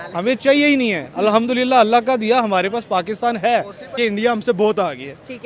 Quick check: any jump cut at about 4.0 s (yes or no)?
yes